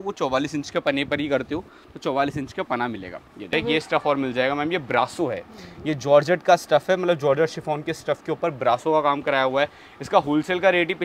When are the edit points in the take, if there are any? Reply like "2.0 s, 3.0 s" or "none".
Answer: 3.5 s